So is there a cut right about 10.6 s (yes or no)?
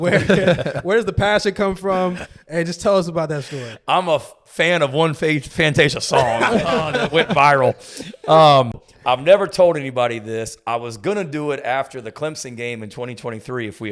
no